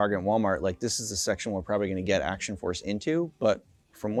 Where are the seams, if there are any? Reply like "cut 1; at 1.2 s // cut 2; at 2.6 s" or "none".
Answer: none